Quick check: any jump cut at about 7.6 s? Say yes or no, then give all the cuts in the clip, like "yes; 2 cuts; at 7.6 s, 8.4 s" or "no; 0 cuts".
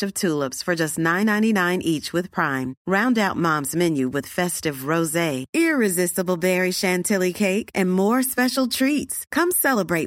no; 0 cuts